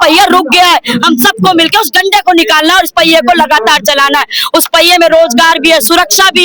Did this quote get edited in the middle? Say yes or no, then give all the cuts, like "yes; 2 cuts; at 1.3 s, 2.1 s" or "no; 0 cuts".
no; 0 cuts